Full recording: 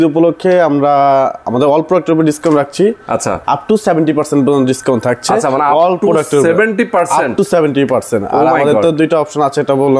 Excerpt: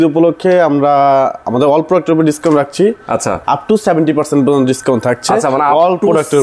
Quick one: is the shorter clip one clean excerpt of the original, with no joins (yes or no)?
yes